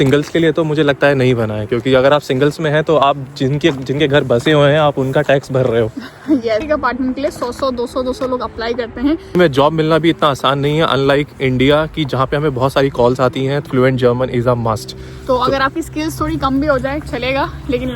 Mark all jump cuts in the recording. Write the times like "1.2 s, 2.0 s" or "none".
6.6 s, 9.4 s, 13.6 s